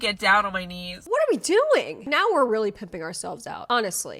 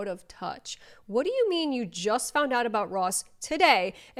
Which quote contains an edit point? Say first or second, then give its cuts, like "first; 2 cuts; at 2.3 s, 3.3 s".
first; 2 cuts; at 1.0 s, 2.0 s